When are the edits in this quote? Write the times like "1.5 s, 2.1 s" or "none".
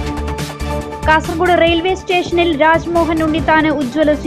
0.9 s